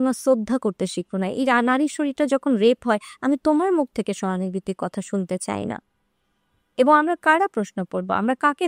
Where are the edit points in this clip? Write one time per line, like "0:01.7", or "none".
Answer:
none